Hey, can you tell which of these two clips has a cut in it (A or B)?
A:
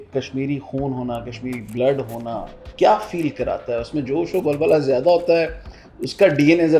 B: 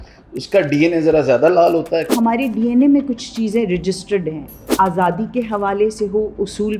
B